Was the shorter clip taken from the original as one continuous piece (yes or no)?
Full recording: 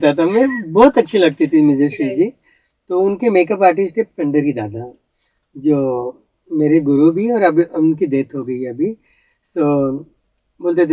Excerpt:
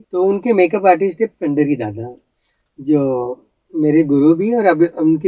yes